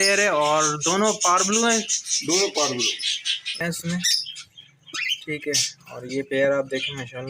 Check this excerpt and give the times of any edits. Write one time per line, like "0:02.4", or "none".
0:03.5